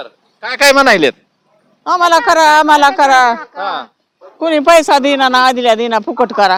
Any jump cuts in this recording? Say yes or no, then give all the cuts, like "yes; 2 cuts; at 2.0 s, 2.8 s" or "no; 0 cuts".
no; 0 cuts